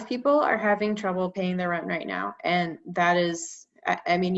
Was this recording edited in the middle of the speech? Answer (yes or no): no